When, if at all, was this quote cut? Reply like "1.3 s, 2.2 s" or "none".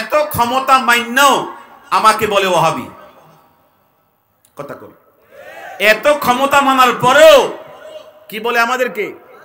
none